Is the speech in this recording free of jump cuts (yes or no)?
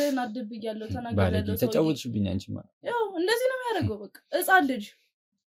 yes